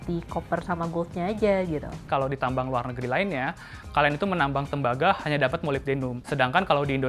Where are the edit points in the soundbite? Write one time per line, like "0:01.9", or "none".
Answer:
0:02.0
0:06.2